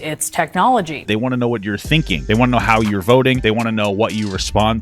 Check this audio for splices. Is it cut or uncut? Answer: cut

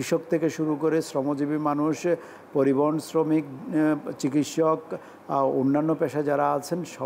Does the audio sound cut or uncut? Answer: uncut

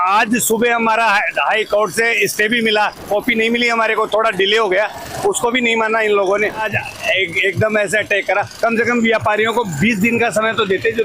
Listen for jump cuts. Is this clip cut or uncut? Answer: cut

